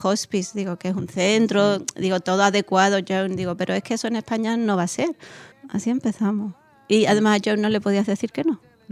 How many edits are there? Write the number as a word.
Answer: one